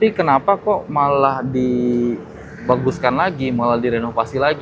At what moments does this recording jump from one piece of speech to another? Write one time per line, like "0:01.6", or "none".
none